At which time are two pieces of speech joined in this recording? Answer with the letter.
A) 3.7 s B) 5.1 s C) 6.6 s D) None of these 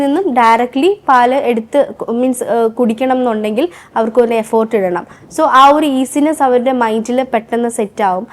D